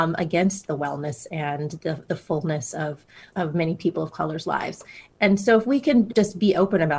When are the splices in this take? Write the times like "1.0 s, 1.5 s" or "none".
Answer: 3.2 s, 5.1 s, 6.1 s